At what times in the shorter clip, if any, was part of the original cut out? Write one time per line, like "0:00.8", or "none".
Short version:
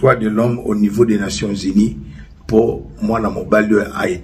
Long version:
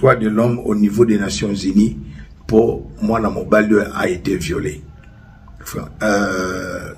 none